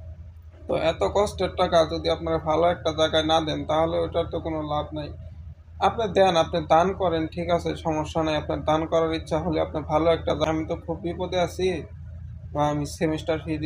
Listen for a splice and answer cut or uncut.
cut